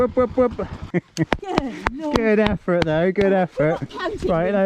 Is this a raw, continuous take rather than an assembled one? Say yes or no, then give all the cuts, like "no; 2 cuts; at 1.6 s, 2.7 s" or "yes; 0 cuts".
no; 1 cut; at 1.1 s